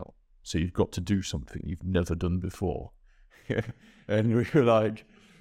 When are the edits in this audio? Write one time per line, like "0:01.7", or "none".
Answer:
none